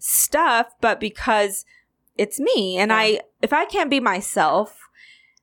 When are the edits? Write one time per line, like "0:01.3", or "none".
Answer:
0:03.3